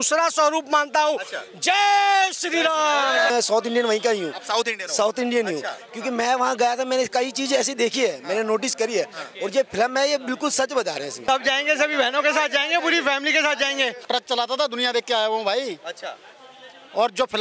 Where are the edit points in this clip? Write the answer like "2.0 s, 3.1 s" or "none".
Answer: 3.3 s, 11.2 s, 14.0 s